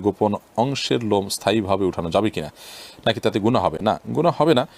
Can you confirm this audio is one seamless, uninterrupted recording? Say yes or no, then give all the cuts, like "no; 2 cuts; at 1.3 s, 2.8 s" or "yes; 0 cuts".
yes; 0 cuts